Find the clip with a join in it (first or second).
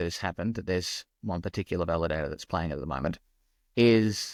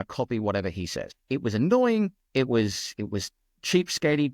second